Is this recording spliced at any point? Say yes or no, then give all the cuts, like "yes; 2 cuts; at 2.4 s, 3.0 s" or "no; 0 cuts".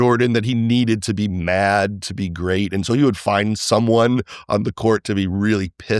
no; 0 cuts